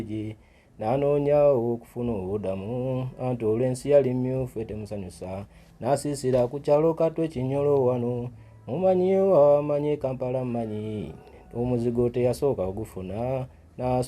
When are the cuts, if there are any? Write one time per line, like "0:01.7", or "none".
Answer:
none